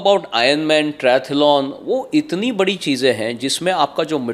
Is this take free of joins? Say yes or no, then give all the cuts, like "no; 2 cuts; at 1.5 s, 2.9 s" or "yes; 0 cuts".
yes; 0 cuts